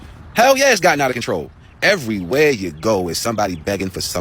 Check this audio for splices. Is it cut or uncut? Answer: uncut